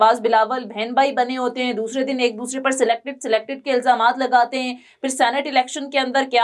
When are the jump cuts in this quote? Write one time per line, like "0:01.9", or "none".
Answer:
none